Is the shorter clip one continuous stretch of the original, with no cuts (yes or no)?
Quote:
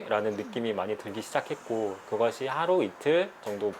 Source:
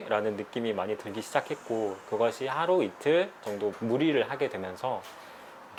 yes